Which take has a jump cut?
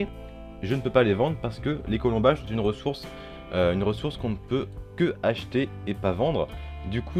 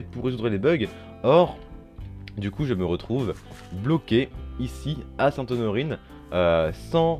first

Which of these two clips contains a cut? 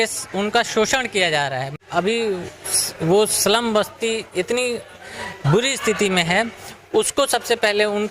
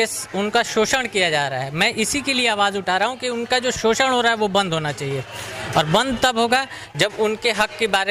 first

